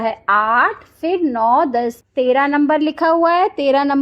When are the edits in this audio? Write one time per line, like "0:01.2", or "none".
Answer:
0:02.0